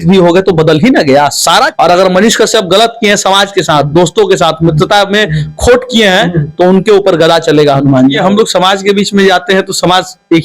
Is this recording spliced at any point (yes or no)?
yes